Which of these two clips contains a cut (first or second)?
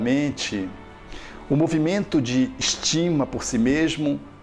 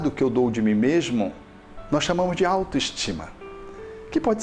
second